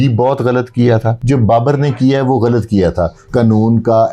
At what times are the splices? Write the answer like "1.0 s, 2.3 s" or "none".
1.1 s, 3.2 s